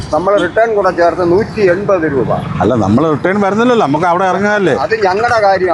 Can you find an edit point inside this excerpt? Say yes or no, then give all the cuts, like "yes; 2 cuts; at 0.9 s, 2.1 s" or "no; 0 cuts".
no; 0 cuts